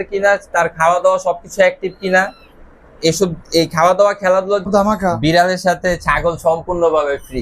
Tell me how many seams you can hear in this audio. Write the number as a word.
one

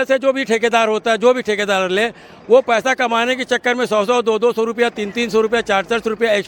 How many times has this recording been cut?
zero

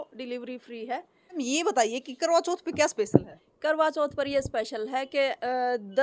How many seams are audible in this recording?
one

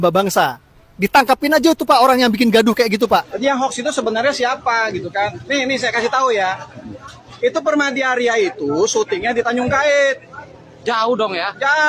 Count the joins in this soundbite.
one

